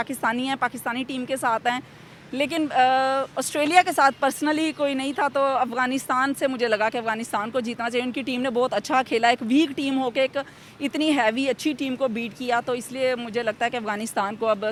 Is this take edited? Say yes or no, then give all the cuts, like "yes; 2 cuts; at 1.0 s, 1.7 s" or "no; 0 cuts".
no; 0 cuts